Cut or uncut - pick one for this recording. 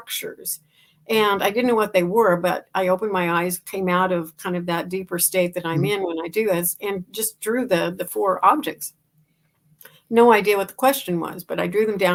uncut